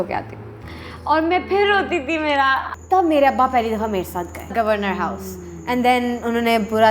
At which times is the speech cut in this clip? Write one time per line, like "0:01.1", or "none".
0:02.7
0:04.5